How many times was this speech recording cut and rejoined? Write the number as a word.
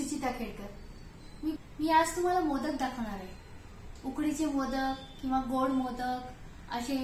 one